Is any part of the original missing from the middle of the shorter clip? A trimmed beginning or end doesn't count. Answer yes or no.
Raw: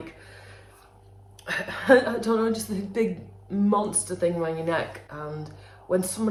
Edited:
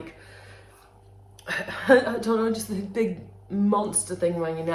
no